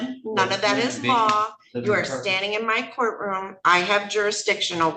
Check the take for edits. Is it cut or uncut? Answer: uncut